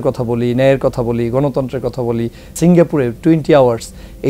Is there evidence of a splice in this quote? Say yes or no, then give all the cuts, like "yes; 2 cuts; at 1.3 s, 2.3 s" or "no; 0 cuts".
yes; 1 cut; at 2.5 s